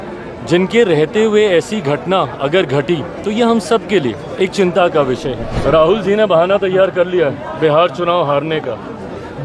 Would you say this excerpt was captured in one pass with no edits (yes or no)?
no